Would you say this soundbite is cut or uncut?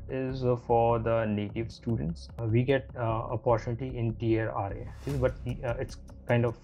cut